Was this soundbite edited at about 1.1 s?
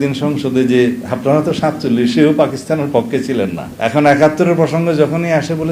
no; 1 cut; at 3.6 s

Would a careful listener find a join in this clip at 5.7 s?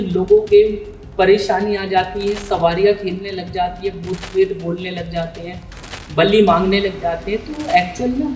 no; 0 cuts

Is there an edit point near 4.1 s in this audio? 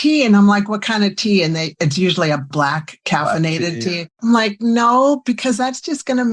yes; 2 cuts; at 2.5 s, 4.1 s

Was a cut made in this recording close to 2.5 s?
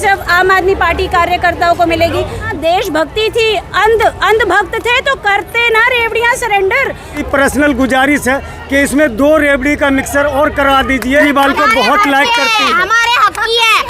yes; 3 cuts; at 2.5 s, 7.2 s, 11.2 s

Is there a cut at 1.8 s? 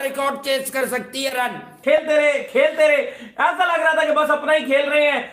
yes; 1 cut; at 1.8 s

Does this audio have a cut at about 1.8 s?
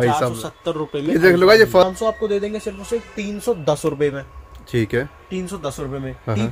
yes; 1 cut; at 1.8 s

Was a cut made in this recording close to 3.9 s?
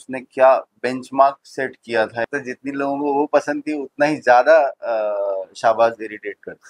no; 1 cut; at 2.3 s

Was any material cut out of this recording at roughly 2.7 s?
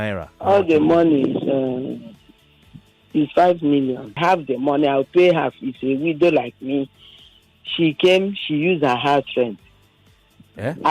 no; 1 cut; at 4.2 s

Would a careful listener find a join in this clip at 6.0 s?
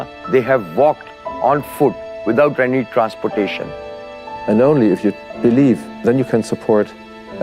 no; 1 cut; at 4.2 s

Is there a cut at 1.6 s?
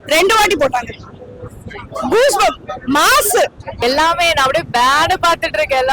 no; 1 cut; at 3.8 s

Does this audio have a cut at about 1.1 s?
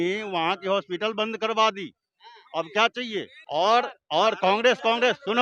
no; 1 cut; at 3.4 s

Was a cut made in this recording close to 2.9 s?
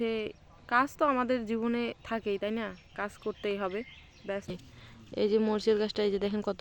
no; 1 cut; at 4.4 s

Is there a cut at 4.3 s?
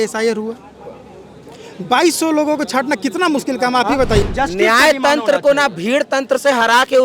yes; 1 cut; at 4.3 s

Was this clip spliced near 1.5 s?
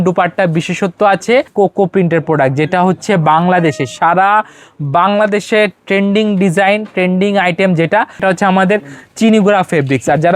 yes; 2 cuts; at 1.5 s, 8.2 s

